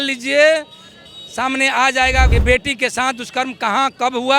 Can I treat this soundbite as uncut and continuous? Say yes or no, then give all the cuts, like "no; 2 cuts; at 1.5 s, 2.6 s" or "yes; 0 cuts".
no; 1 cut; at 2.3 s